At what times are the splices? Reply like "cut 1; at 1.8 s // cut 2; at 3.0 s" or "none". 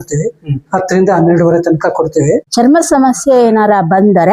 cut 1; at 2.5 s